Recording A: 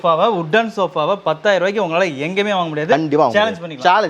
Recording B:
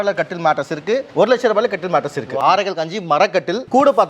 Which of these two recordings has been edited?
B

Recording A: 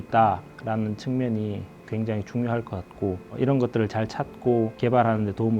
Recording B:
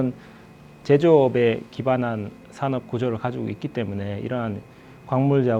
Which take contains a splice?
A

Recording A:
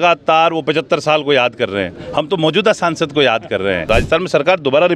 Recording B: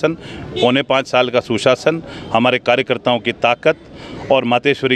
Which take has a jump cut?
A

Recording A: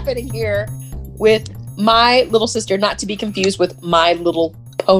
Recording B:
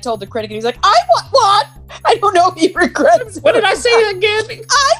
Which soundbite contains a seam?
B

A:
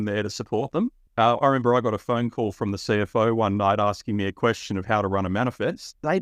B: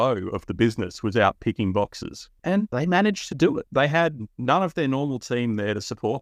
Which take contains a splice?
B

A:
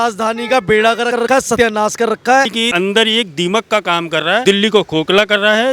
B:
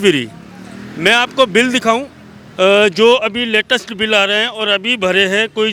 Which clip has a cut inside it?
A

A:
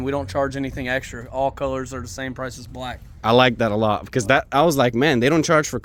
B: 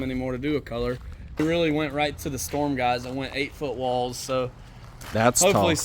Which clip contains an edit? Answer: B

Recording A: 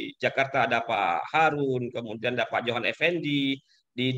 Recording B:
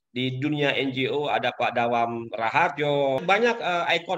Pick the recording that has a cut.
B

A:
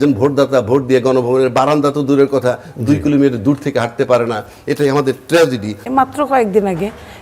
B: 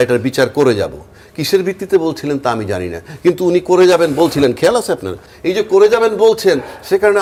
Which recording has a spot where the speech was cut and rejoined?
A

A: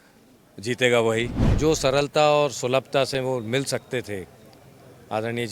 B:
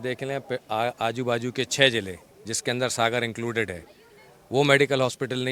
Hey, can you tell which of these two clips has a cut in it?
A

